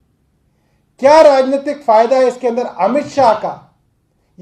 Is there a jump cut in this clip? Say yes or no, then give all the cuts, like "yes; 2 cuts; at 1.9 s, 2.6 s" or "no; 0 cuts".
no; 0 cuts